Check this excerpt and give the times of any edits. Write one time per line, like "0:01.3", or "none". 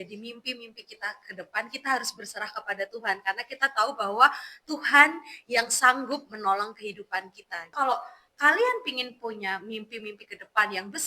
0:07.7